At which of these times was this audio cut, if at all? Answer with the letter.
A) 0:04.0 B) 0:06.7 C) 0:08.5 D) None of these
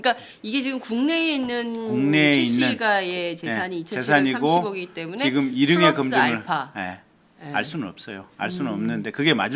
D